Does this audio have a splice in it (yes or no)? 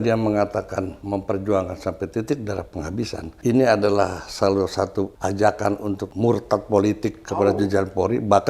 yes